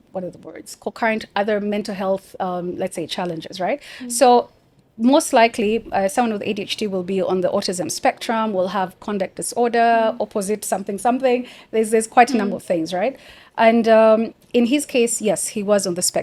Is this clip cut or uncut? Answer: uncut